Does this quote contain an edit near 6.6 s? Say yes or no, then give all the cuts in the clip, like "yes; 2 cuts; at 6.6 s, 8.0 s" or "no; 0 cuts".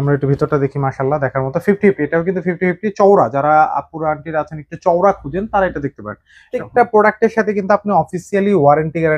yes; 1 cut; at 6.6 s